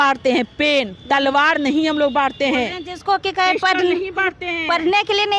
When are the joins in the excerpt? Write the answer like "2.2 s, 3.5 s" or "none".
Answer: none